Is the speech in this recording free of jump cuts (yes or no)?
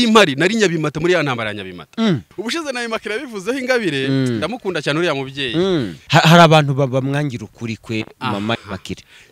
no